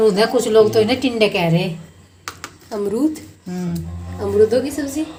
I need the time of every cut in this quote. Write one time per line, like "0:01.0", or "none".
none